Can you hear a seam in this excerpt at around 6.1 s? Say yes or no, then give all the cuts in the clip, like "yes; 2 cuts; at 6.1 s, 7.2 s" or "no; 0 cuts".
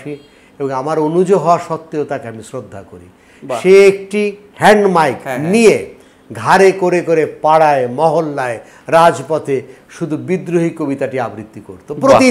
no; 1 cut; at 4.4 s